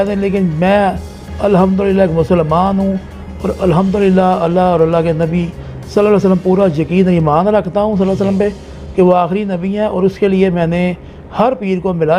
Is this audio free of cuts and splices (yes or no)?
yes